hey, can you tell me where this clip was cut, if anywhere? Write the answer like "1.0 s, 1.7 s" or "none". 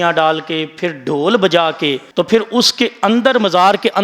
2.0 s